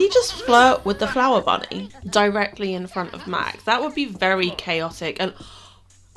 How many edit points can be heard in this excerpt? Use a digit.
0